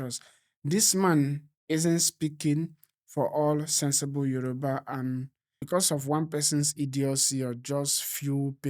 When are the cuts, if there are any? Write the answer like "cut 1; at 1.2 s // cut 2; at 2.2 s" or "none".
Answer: cut 1; at 5.5 s